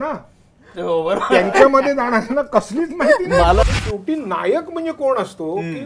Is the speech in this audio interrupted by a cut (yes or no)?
yes